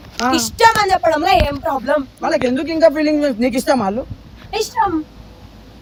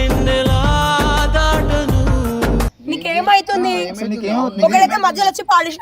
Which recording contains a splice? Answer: second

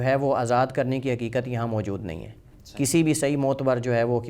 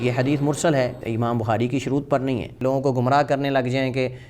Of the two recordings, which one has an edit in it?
second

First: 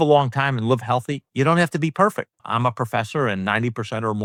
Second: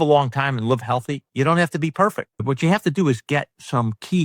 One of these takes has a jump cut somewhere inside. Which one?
second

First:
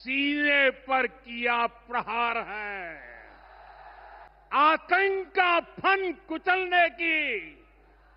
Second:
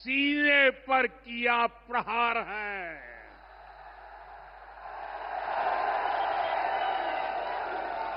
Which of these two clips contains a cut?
first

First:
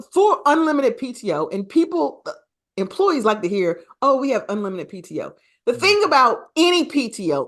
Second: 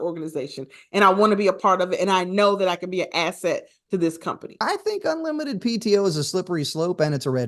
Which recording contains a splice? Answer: second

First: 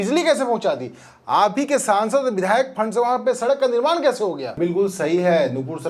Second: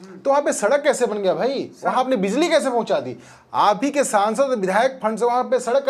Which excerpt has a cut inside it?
first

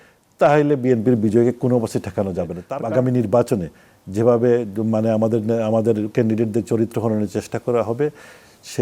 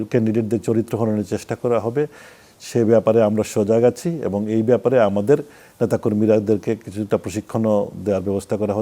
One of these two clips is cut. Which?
first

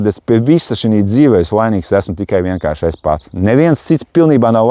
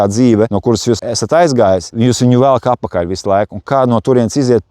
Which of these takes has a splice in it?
second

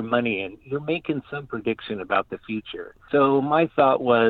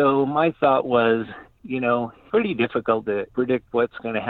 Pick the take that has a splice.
second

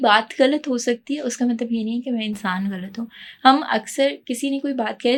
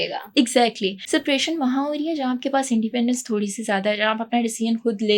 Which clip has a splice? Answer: second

